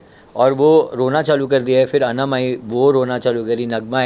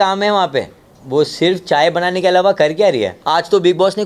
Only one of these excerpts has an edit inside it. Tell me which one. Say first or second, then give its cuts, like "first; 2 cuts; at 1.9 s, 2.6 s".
second; 1 cut; at 3.2 s